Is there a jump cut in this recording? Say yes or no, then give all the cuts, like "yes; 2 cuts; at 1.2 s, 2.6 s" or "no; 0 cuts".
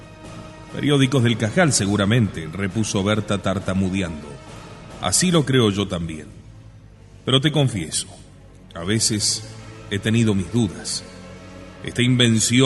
yes; 1 cut; at 7.6 s